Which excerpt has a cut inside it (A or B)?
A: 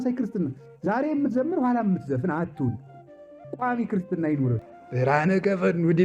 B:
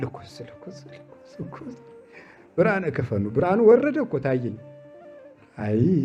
A